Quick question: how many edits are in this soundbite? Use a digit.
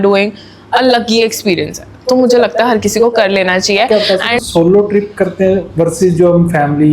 1